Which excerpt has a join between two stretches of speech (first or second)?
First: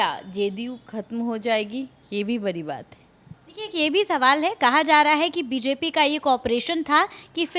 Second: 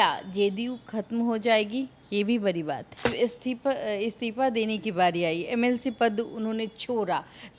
second